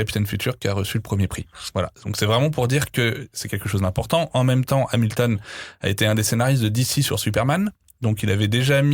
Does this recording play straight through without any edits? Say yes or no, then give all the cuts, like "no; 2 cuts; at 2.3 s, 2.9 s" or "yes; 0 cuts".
yes; 0 cuts